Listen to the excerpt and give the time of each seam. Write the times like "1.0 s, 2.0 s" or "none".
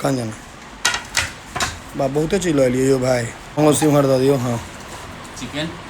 3.4 s